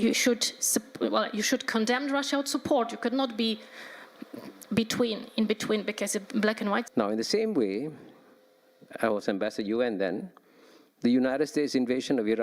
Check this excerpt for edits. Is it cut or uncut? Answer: cut